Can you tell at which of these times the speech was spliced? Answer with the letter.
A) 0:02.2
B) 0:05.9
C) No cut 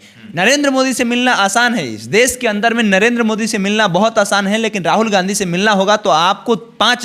C